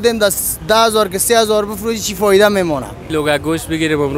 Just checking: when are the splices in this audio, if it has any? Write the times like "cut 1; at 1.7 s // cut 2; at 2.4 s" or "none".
cut 1; at 3.0 s